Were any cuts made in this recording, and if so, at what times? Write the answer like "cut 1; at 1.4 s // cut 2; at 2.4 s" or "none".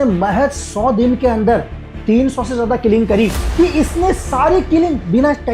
cut 1; at 3.4 s